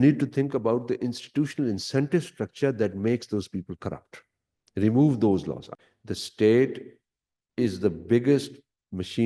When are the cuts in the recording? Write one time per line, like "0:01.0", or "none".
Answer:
0:05.6